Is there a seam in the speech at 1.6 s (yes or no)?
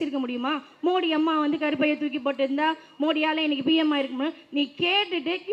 no